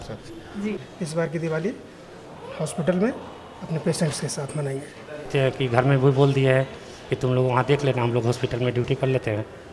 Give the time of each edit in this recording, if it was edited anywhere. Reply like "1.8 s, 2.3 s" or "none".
0.8 s, 5.3 s